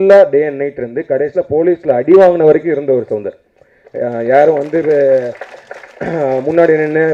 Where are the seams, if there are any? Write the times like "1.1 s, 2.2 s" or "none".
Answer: none